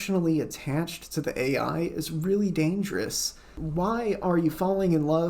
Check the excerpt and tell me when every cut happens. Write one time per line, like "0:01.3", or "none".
0:03.6